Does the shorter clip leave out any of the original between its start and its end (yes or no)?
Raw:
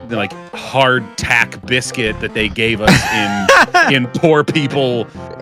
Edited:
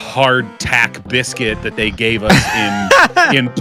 no